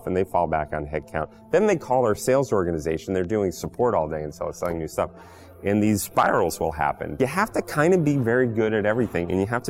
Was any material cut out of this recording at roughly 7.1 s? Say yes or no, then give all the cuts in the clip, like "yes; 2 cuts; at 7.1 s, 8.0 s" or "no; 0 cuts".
yes; 1 cut; at 7.1 s